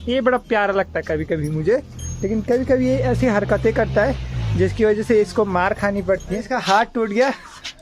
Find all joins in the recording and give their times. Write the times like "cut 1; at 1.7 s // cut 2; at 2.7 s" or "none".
cut 1; at 6.5 s